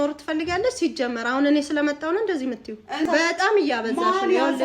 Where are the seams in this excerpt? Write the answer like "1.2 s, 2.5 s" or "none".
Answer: 3.1 s